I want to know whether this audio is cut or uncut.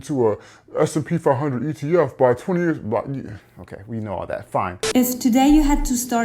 cut